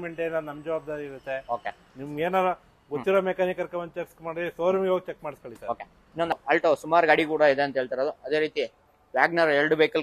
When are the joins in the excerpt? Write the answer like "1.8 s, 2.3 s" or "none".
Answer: 6.3 s